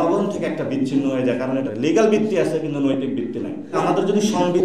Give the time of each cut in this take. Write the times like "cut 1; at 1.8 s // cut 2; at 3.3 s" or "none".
cut 1; at 1.7 s // cut 2; at 3.8 s